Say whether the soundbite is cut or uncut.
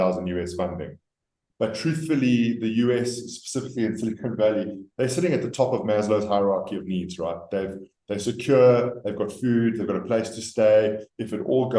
cut